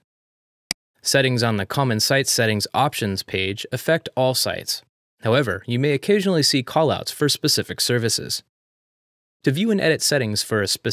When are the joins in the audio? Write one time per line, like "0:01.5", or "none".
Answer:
0:01.4